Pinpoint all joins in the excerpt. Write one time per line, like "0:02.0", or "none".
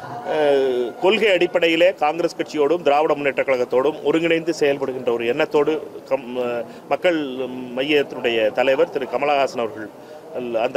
none